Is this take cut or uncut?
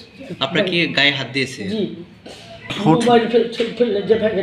cut